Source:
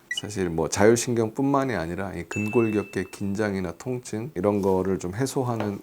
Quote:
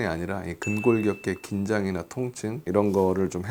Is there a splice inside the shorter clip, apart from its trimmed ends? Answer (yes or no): no